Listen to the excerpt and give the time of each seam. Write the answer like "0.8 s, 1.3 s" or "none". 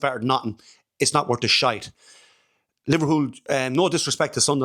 none